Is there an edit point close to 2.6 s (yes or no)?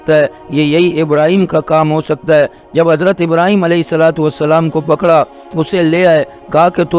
no